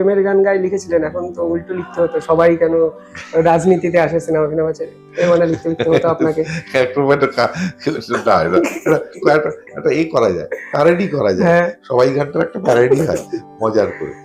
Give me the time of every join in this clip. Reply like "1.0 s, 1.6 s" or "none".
none